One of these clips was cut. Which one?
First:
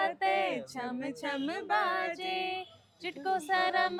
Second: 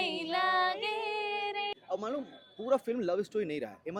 second; 1 cut; at 1.8 s

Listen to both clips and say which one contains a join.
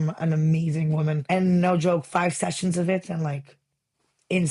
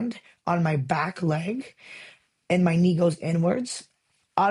first; 1 cut; at 1.2 s

